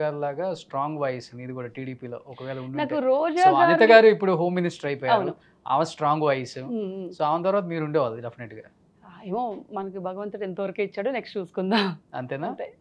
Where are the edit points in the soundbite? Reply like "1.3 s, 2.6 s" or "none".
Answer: none